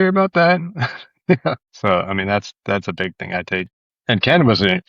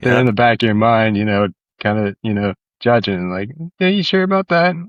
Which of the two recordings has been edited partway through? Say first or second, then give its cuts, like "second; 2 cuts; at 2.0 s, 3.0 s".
first; 2 cuts; at 1.7 s, 3.8 s